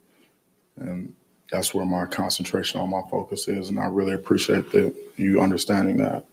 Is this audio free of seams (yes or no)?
yes